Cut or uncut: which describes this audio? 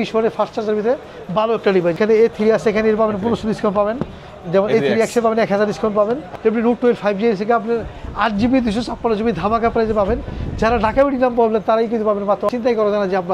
cut